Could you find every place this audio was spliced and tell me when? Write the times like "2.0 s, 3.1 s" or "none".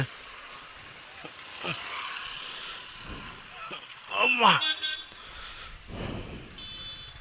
none